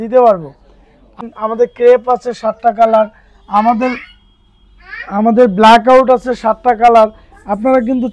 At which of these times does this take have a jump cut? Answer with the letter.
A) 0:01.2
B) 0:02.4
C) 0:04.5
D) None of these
A